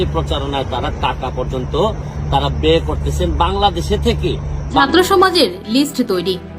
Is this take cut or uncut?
cut